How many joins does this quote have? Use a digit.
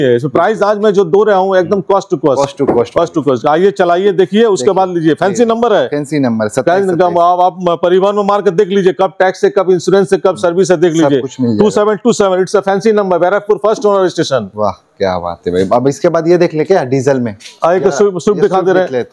0